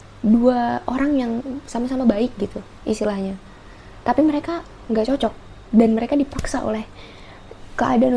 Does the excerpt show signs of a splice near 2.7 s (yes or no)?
no